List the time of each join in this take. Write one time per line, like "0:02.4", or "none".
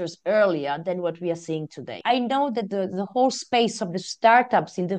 0:02.0

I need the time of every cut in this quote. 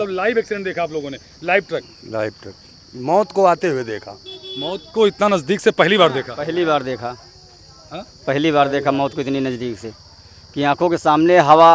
none

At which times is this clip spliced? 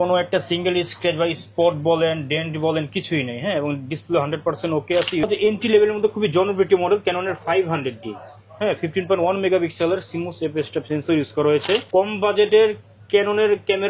0:05.2
0:11.8

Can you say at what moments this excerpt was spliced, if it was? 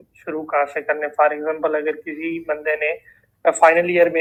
none

